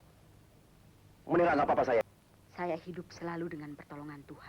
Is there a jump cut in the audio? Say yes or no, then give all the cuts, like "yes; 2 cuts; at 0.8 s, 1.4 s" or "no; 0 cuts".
yes; 1 cut; at 2.0 s